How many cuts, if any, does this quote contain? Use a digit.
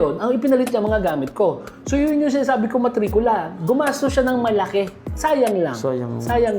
1